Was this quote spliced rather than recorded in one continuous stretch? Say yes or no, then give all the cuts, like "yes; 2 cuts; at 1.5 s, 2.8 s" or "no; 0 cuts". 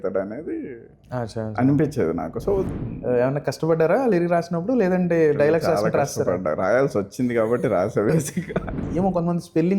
yes; 2 cuts; at 2.7 s, 8.8 s